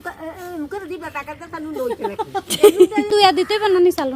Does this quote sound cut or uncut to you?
cut